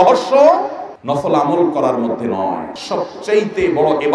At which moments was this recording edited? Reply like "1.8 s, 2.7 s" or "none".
2.7 s